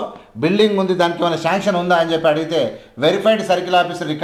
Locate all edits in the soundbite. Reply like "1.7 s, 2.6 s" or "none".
none

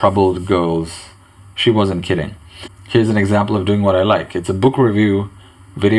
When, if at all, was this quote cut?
2.4 s

